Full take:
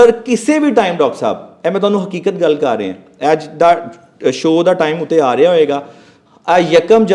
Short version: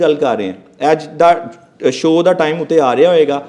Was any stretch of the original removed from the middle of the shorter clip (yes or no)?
no